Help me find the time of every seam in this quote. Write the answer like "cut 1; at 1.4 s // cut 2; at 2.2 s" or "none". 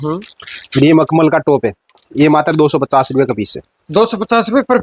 none